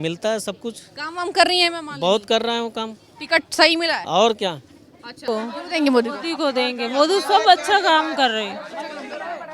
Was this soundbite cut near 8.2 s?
no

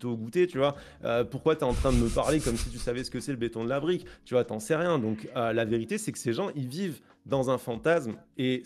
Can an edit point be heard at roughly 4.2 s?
no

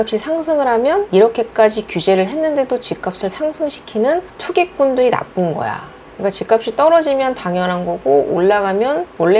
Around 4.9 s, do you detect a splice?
no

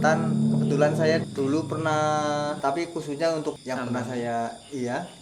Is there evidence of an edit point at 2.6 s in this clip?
yes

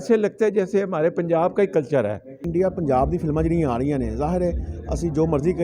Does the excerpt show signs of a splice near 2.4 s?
yes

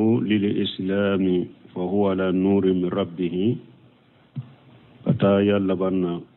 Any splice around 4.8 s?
no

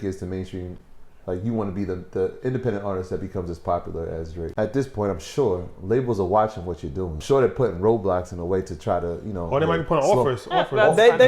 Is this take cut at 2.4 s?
no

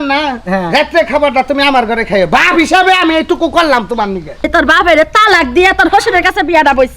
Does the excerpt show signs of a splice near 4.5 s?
yes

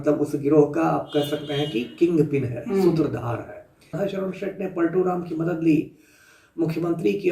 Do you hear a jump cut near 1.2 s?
no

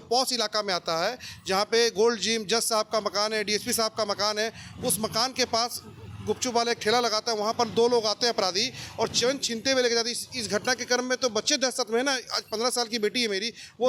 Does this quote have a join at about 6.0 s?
no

